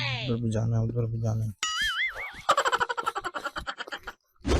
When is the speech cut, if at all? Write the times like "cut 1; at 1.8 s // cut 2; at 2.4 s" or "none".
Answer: none